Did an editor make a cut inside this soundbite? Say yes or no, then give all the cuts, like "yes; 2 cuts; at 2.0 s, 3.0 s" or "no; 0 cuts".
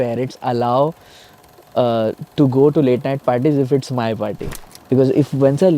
yes; 1 cut; at 4.5 s